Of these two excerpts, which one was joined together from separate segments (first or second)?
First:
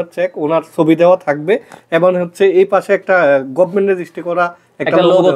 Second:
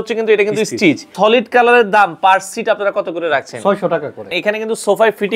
second